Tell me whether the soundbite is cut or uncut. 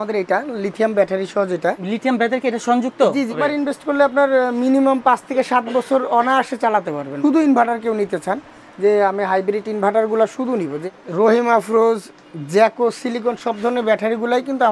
cut